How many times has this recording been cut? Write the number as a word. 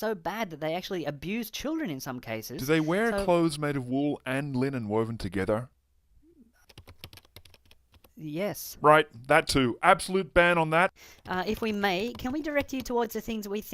one